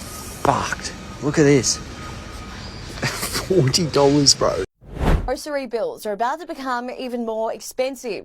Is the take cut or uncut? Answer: cut